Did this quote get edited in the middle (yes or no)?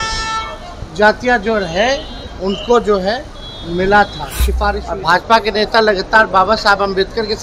yes